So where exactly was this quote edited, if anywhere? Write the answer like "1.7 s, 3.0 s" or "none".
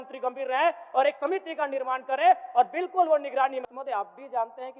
3.6 s